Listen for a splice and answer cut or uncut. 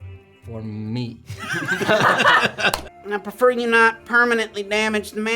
cut